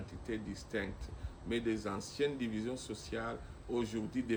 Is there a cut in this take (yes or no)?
no